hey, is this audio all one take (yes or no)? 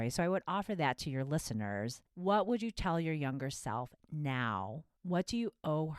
no